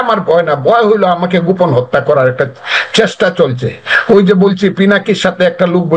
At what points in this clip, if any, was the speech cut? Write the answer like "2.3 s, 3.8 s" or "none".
none